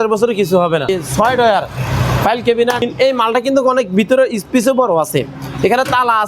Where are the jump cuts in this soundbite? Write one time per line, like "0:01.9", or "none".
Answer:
0:00.9
0:02.8